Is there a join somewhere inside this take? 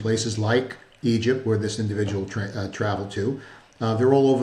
no; 0 cuts

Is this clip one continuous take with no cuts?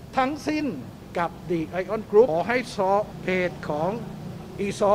no; 2 cuts; at 2.3 s, 3.1 s

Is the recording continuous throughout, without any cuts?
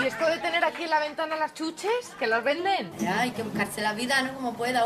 no; 1 cut; at 2.9 s

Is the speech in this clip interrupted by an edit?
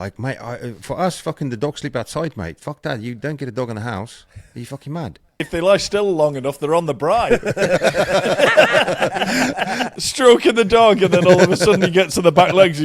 yes; 2 cuts; at 5.4 s, 10.0 s

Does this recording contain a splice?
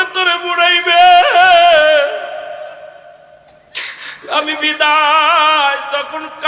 no; 0 cuts

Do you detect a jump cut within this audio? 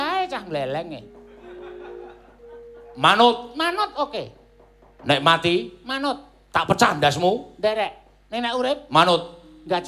no; 0 cuts

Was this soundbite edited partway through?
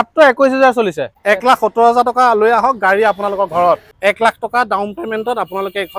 yes; 2 cuts; at 1.1 s, 3.9 s

